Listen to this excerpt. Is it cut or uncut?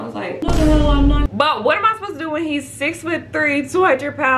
cut